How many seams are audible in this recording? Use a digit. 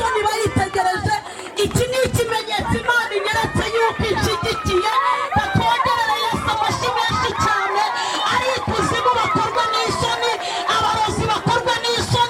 0